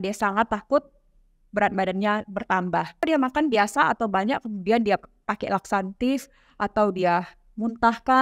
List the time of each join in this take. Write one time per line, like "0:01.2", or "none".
0:03.0

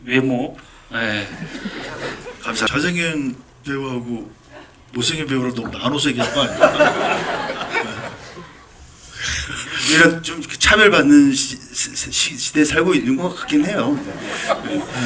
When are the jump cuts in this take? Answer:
0:02.7

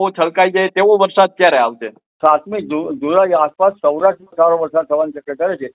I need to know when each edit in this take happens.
0:02.1

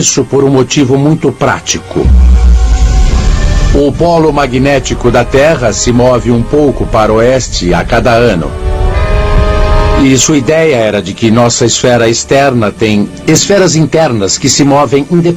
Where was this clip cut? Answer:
0:11.9

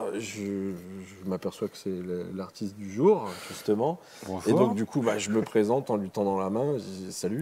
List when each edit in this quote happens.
none

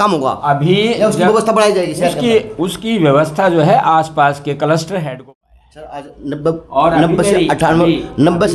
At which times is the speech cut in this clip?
0:05.0

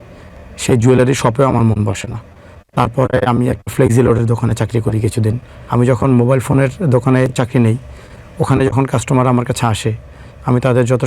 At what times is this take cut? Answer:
0:05.5

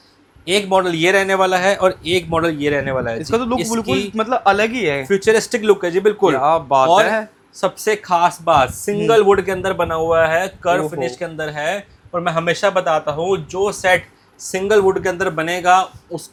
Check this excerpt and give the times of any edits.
none

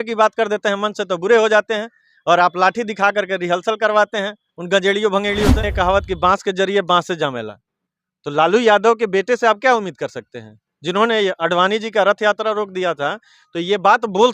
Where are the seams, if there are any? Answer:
0:05.6

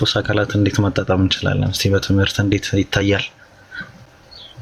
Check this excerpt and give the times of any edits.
none

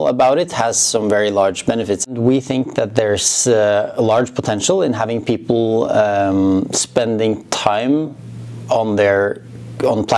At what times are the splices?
0:02.1

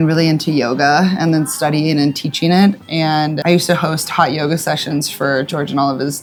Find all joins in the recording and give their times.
none

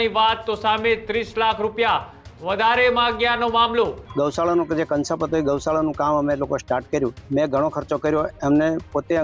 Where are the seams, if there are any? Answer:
0:04.0
0:07.2

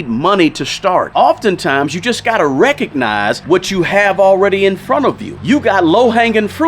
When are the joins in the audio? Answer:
0:01.1
0:03.4
0:05.3

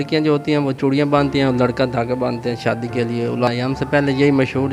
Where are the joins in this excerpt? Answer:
0:03.5

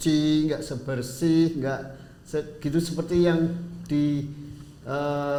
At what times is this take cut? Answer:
none

